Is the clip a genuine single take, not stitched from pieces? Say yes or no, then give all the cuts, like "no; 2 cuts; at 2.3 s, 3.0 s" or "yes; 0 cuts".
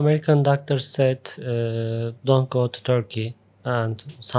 yes; 0 cuts